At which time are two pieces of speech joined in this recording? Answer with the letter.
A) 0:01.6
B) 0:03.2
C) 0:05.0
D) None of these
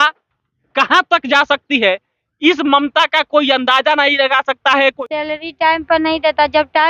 C